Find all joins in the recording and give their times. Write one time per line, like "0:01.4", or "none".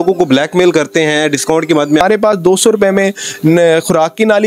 0:02.0